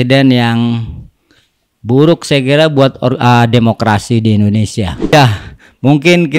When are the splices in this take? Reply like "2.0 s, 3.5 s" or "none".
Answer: 5.1 s